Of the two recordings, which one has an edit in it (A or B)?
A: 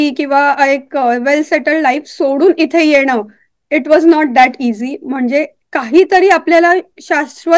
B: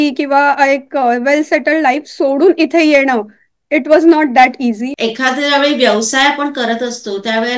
B